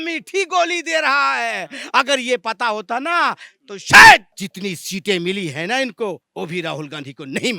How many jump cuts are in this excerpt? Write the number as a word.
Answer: two